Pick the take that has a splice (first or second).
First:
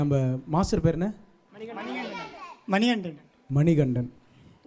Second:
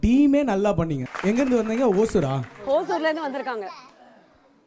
second